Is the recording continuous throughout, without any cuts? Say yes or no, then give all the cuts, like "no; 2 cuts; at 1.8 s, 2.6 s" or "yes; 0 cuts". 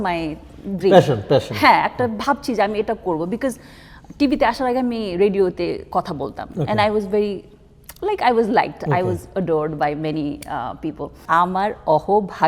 no; 1 cut; at 11.2 s